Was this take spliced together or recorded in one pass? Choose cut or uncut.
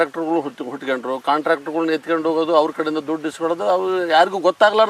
uncut